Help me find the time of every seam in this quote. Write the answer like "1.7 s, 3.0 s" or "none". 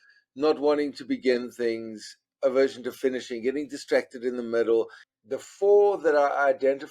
5.0 s